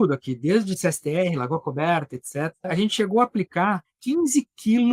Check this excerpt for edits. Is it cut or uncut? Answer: cut